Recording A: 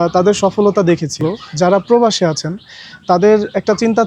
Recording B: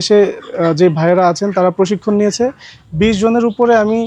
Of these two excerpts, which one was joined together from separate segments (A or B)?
A